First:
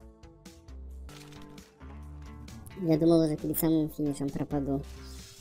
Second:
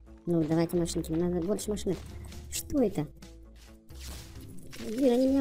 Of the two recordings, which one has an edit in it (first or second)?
first